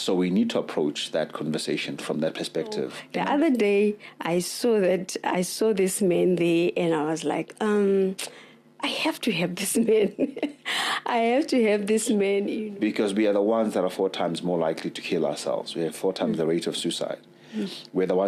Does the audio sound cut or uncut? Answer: cut